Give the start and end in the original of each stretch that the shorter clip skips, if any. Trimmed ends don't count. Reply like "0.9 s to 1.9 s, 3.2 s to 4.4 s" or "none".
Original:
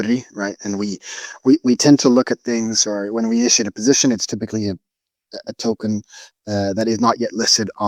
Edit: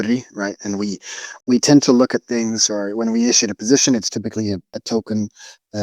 1.4 s to 1.6 s, 4.9 s to 5.5 s